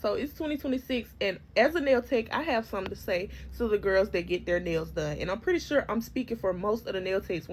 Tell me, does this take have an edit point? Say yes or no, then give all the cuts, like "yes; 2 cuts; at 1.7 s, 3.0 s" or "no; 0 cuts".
no; 0 cuts